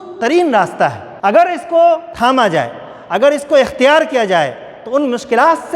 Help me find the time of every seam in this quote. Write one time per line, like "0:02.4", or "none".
0:01.1
0:02.1